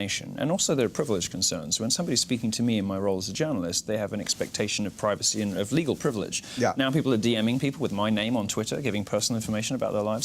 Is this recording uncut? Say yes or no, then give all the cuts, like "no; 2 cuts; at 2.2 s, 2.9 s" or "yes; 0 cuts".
no; 1 cut; at 2.6 s